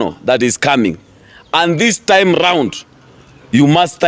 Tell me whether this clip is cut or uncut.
uncut